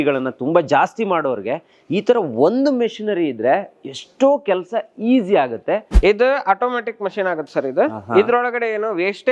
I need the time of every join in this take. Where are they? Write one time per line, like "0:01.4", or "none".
0:05.9